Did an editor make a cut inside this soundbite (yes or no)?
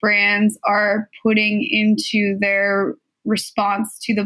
no